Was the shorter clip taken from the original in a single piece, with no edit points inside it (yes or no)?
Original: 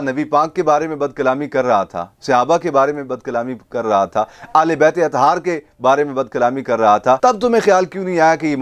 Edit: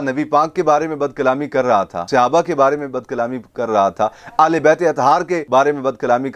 no